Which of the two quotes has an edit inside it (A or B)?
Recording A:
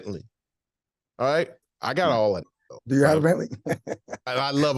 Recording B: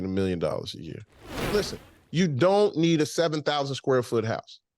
B